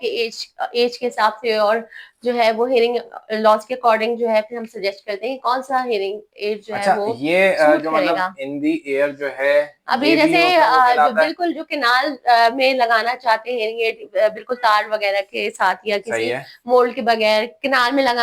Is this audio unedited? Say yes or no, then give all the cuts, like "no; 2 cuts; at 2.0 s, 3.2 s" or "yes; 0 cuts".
yes; 0 cuts